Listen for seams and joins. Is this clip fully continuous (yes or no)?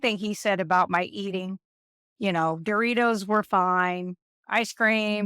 yes